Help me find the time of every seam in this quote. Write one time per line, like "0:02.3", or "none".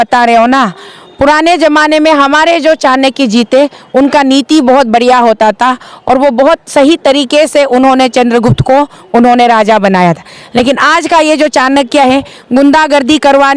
none

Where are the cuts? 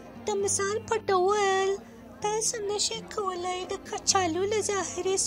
0:01.9

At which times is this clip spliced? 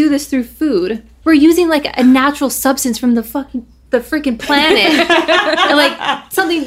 0:01.2

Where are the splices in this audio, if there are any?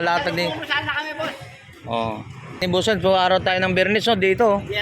0:02.6

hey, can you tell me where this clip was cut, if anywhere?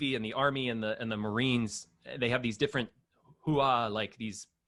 none

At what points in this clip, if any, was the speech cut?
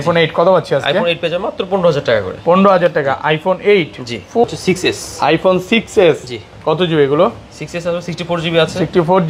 0:04.4

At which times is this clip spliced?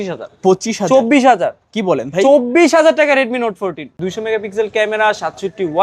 0:03.9

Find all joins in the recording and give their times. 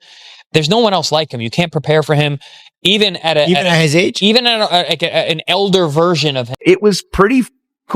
0:06.6

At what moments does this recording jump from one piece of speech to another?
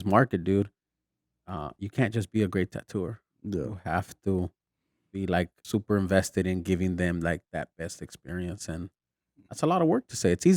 0:05.6

